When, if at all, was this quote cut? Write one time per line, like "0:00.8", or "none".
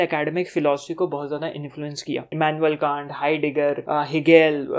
0:02.3
0:03.8